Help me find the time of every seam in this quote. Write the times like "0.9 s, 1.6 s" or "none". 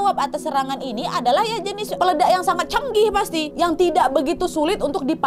1.9 s, 3.5 s